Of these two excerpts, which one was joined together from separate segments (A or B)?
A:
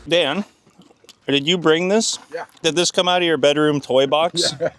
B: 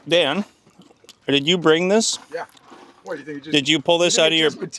A